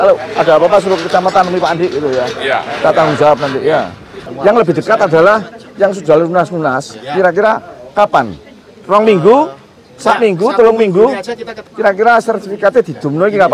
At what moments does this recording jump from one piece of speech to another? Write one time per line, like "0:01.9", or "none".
0:04.2
0:11.6